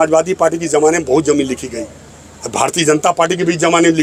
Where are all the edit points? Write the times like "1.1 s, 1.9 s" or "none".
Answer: none